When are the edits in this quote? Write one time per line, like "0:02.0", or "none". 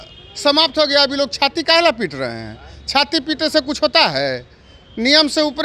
none